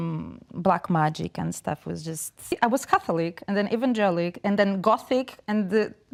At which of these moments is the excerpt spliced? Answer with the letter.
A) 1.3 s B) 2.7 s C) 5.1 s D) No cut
D